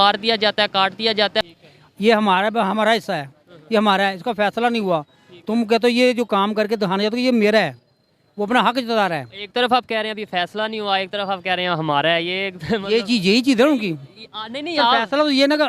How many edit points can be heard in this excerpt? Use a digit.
1